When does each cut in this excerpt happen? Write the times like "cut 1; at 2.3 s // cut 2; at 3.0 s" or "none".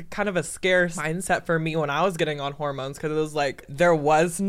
cut 1; at 1.0 s // cut 2; at 3.7 s